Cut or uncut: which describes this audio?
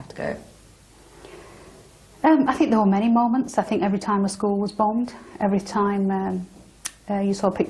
uncut